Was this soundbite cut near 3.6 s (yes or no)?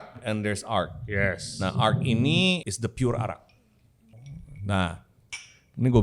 yes